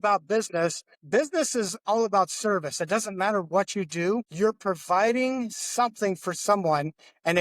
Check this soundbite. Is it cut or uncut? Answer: cut